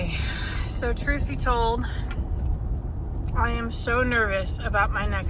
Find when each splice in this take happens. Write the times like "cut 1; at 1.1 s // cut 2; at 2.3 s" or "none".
none